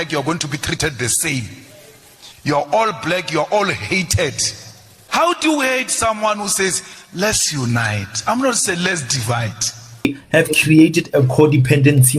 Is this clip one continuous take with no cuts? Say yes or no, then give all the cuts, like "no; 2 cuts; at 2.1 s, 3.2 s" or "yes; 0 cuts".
no; 1 cut; at 10.1 s